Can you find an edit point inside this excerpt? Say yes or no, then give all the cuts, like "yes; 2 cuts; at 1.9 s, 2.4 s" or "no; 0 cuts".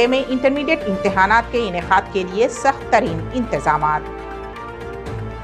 no; 0 cuts